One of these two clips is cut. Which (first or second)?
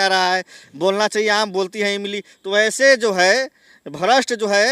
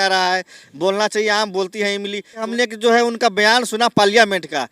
second